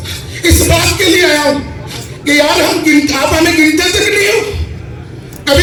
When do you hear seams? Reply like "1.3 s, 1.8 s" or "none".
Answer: none